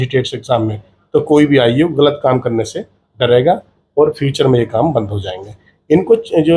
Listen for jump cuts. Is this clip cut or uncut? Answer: uncut